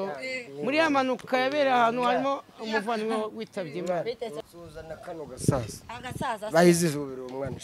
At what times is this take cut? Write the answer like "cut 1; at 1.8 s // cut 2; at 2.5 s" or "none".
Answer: cut 1; at 4.4 s